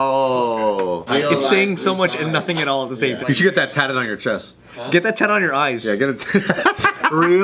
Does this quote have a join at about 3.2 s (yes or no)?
yes